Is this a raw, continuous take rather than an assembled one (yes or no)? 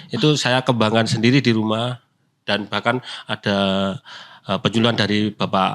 yes